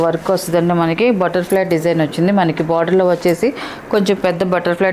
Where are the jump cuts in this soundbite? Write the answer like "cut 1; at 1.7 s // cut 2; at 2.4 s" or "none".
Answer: none